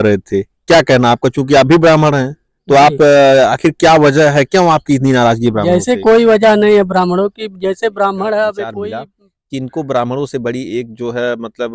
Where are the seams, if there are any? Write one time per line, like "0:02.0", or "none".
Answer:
0:08.8